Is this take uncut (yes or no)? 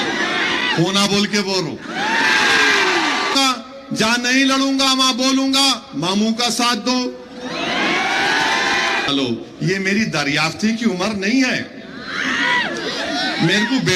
no